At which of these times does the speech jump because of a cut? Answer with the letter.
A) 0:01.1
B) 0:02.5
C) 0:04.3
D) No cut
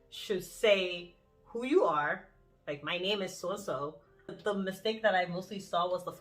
C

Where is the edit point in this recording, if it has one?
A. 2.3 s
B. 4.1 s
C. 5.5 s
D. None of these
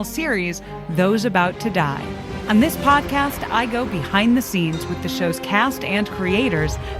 A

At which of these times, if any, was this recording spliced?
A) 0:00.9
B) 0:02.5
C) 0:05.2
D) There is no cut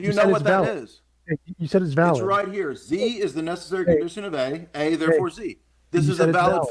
D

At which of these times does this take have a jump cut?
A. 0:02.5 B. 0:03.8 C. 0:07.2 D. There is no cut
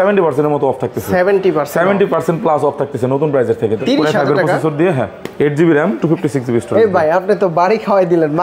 B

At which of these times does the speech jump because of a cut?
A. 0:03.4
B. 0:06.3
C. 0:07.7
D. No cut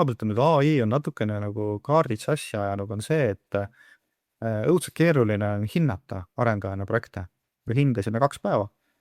C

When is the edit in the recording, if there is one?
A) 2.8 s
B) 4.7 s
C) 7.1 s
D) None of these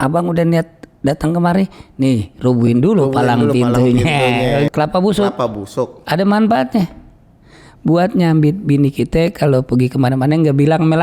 B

